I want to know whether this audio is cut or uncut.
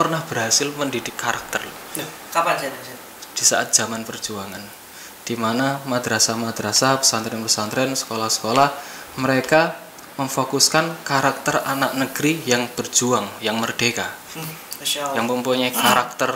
uncut